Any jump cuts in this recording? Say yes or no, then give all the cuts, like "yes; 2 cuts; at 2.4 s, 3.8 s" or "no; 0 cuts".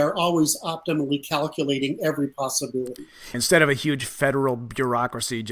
yes; 1 cut; at 3.4 s